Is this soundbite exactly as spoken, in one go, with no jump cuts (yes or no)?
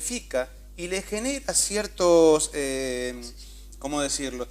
yes